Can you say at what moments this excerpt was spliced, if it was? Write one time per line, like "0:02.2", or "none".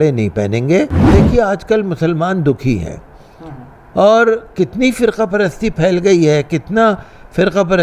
0:01.0